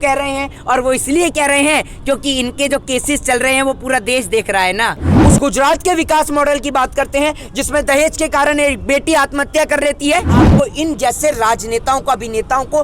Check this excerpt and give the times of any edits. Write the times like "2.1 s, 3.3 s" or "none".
5.1 s, 10.5 s